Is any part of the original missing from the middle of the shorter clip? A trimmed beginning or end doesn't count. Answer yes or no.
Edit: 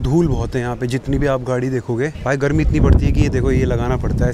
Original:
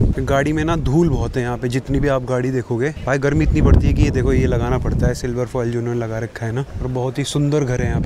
no